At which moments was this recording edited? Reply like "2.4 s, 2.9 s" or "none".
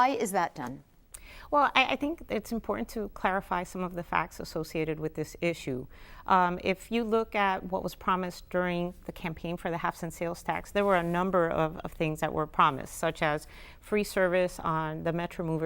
1.6 s